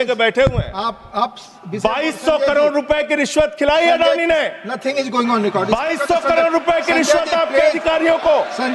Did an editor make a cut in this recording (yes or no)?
no